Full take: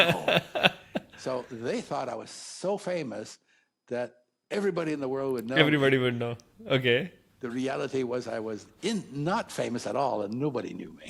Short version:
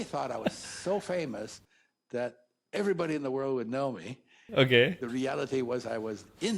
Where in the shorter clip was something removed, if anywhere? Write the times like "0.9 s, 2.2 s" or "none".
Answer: 3.9 s, 5.0 s

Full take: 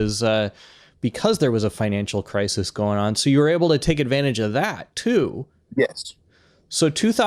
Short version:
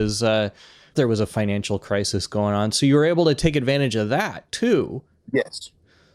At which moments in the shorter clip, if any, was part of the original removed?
0.9 s

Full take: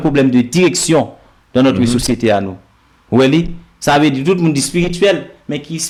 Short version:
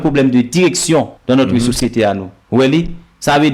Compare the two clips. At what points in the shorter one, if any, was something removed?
1.1 s, 2.3 s

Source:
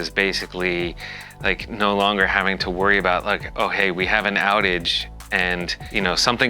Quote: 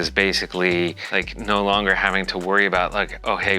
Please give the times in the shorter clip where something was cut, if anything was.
1.0 s

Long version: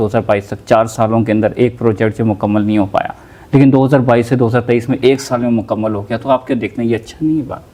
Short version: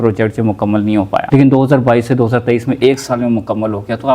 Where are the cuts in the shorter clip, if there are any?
1.3 s

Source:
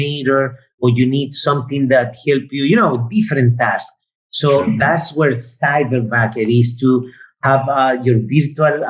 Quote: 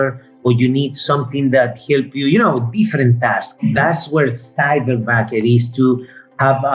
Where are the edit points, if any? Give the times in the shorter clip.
3.6 s

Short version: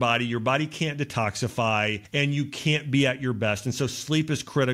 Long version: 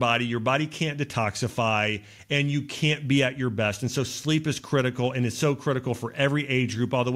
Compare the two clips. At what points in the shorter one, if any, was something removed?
2.0 s

